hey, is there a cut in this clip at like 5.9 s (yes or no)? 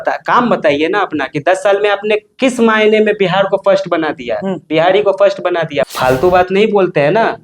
yes